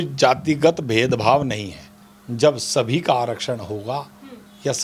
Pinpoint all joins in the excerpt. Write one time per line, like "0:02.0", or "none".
none